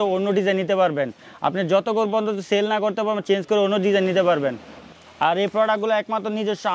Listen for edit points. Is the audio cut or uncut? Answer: uncut